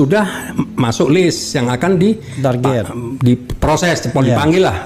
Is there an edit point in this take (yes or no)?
no